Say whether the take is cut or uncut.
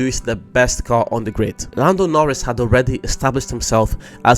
cut